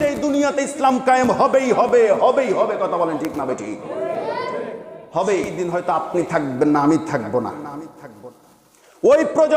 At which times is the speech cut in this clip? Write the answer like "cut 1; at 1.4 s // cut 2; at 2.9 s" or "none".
cut 1; at 5.6 s